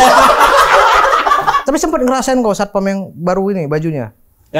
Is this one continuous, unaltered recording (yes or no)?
no